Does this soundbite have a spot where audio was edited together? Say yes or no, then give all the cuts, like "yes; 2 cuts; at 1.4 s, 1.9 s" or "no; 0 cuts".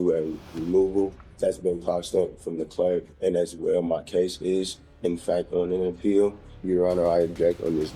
yes; 3 cuts; at 1.2 s, 3.1 s, 6.5 s